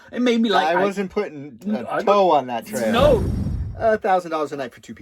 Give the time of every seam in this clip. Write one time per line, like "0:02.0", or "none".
0:03.3